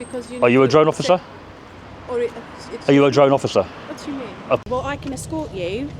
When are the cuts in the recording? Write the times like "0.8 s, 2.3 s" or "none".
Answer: 4.6 s

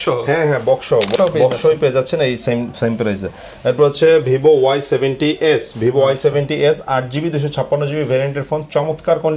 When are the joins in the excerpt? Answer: 1.1 s

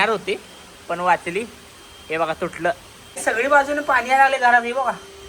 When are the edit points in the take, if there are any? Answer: 3.2 s

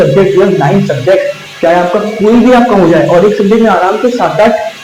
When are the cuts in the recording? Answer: none

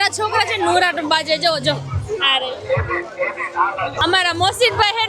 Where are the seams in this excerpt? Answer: 4.0 s

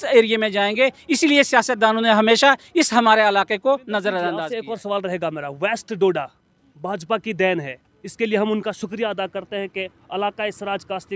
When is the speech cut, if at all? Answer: 4.5 s

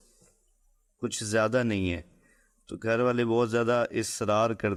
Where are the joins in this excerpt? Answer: none

